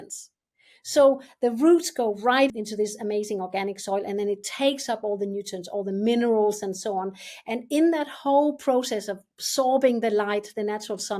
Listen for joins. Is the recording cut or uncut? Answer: cut